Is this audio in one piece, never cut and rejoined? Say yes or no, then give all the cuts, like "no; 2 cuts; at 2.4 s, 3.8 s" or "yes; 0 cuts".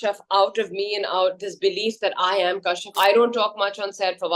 no; 1 cut; at 2.9 s